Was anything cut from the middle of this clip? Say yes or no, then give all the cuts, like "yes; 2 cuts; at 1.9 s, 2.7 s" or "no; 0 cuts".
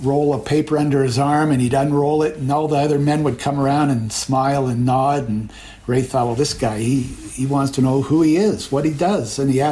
no; 0 cuts